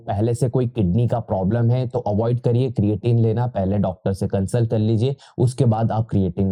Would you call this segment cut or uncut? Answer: uncut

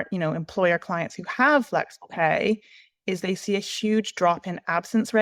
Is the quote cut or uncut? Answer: uncut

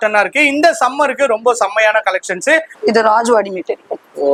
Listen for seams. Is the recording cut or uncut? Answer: uncut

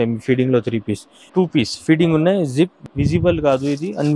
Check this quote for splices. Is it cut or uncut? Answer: cut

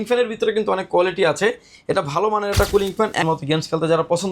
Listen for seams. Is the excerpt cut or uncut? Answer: cut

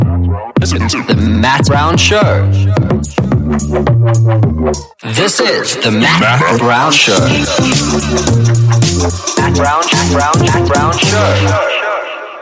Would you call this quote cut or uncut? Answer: uncut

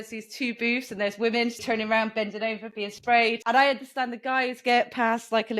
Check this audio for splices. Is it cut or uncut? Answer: cut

